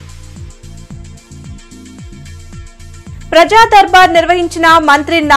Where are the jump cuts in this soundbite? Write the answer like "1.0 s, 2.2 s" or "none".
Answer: none